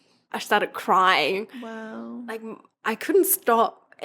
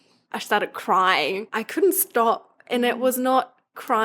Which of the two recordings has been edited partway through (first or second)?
second